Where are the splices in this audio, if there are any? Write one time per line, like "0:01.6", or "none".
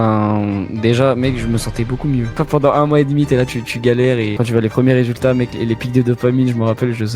0:02.4
0:04.3